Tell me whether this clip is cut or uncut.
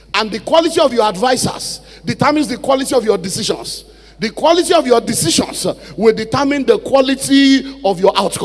uncut